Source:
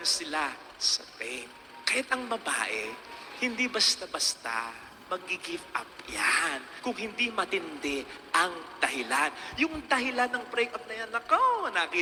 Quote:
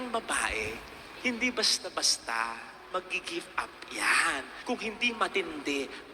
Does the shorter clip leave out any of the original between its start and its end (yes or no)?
no